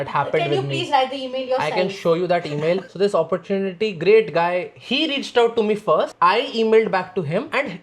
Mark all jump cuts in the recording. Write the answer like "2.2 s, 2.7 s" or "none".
2.9 s

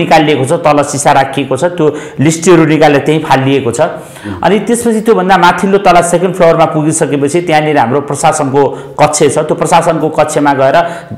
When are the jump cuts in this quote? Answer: none

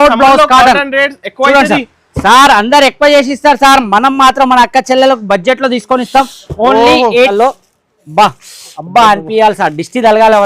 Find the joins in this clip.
7.3 s

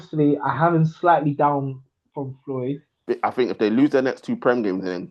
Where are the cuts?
3.0 s

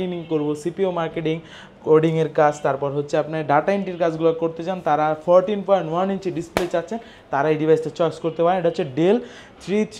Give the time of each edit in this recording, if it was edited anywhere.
none

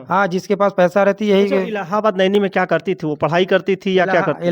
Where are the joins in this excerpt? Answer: none

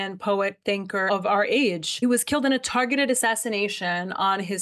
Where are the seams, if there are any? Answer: 1.0 s

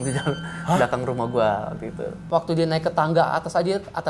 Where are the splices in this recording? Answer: 2.2 s

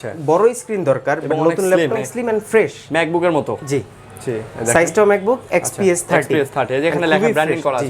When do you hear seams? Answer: 2.0 s

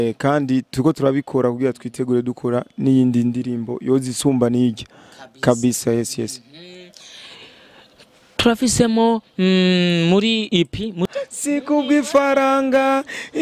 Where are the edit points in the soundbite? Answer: 11.0 s

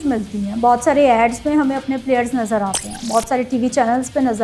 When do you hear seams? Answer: none

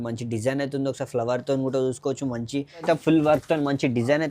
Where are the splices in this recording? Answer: 2.8 s

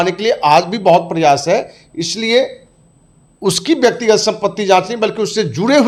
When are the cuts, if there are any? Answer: none

